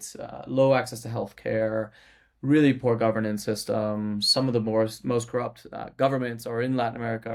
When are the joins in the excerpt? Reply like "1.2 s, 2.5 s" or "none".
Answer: none